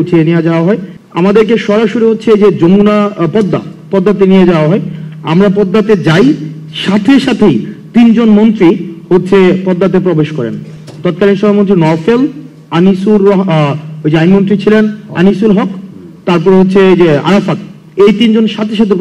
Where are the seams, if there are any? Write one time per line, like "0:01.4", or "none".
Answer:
0:01.0